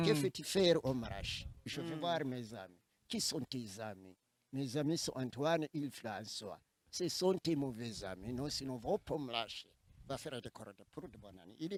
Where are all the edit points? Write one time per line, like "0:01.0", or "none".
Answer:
none